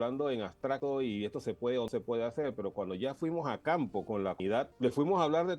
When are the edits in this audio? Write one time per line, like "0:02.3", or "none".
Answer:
0:00.8
0:01.9
0:04.1

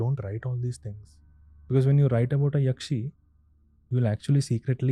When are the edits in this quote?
none

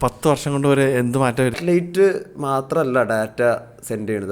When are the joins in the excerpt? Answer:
0:01.6

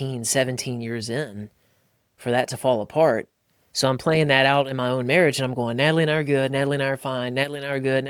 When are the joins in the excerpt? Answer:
none

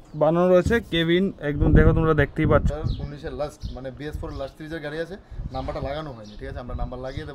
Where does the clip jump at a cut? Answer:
0:02.7

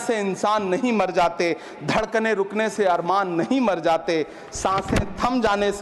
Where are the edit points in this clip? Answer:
none

